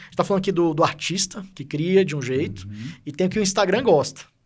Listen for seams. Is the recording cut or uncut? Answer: uncut